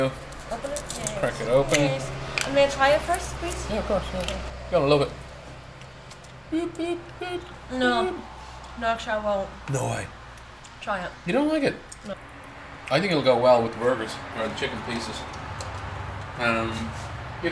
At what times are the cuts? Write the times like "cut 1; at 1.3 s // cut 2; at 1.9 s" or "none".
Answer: cut 1; at 4.5 s